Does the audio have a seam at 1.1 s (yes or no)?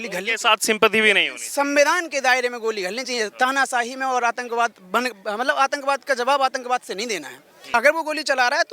no